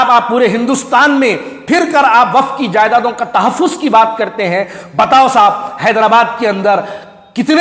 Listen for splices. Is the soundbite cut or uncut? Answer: uncut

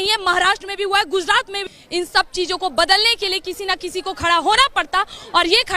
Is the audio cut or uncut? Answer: uncut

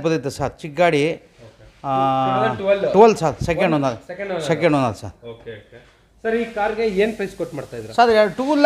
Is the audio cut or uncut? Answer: uncut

